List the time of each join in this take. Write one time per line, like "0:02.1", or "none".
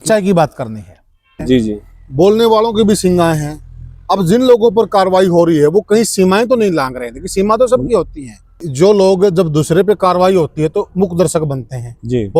0:01.4
0:08.7